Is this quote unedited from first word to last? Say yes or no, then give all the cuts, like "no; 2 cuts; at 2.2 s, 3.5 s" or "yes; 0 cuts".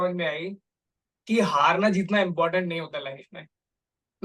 yes; 0 cuts